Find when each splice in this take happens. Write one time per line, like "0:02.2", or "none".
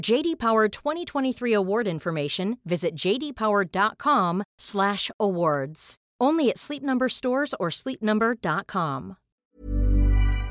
0:09.2